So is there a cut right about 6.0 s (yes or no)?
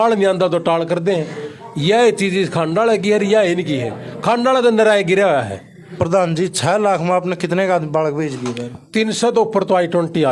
yes